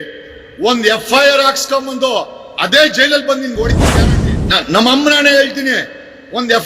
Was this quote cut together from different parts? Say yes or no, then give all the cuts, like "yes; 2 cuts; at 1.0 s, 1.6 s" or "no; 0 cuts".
yes; 1 cut; at 3.9 s